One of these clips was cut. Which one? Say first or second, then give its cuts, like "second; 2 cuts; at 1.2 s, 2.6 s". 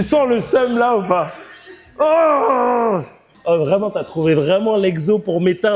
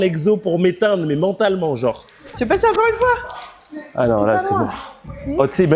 second; 1 cut; at 2.1 s